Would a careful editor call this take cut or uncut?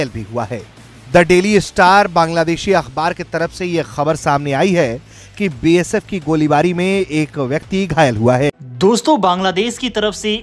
cut